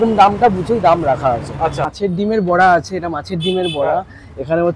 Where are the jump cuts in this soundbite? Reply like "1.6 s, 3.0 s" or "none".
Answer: 1.9 s